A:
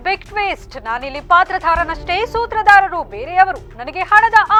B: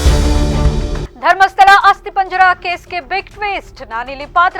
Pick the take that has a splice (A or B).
B